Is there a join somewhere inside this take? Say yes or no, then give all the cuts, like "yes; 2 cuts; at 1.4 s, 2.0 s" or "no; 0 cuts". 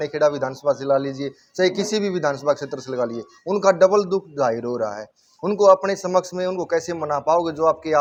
no; 0 cuts